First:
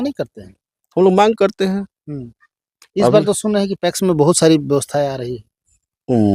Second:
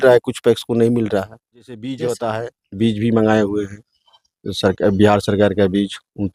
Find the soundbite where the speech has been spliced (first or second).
second